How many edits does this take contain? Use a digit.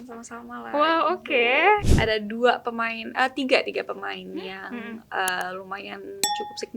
1